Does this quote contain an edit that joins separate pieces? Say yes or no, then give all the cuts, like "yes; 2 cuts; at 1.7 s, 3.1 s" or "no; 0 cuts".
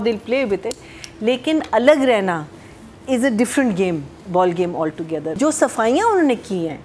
yes; 1 cut; at 5.3 s